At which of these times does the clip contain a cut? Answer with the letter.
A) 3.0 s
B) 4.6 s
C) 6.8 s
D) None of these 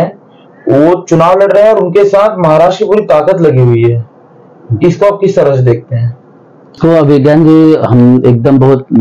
C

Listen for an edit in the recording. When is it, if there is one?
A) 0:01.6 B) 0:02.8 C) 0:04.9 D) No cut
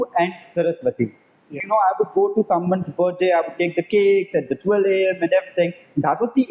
A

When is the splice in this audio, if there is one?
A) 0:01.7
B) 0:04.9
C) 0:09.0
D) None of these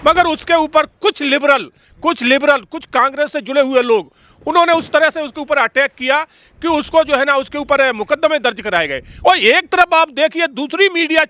C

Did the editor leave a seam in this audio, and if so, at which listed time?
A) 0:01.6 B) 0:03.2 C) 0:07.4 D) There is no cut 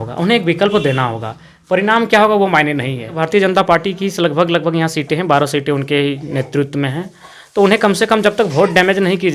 B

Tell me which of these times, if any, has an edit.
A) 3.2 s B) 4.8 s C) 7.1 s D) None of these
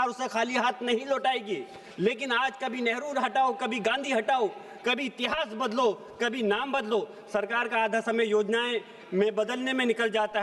D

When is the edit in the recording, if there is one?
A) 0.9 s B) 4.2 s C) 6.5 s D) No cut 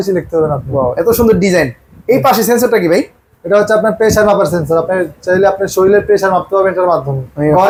D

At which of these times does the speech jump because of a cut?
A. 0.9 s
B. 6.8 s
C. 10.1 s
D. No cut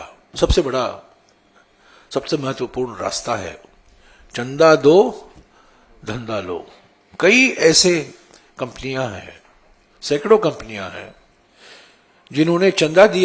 D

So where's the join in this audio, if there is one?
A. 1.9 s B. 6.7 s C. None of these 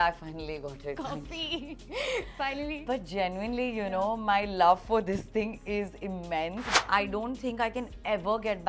B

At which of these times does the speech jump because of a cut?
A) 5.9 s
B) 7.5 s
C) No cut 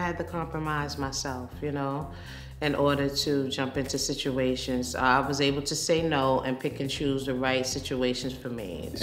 C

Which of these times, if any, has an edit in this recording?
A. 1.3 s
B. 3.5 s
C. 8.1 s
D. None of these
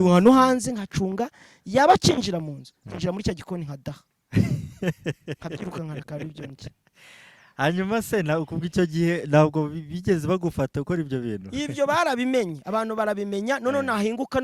D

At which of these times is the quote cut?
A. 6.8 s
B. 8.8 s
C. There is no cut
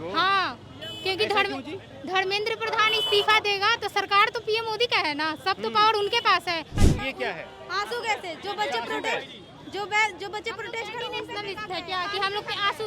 A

